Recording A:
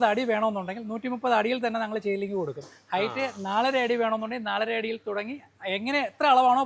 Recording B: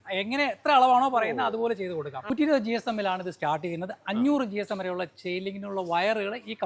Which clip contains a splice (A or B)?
B